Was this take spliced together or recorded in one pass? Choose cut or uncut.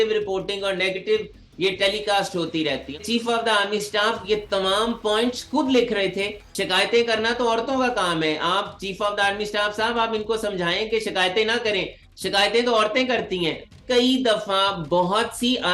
cut